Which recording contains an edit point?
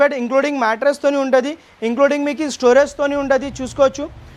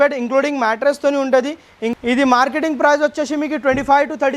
second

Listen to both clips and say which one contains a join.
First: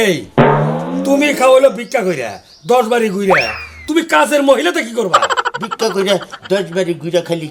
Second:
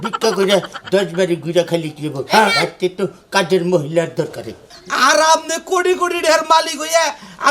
second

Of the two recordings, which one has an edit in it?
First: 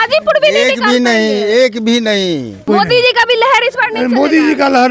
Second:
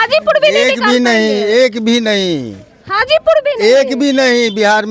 first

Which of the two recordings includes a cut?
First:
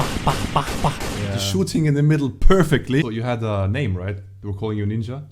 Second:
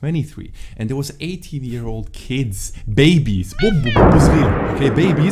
first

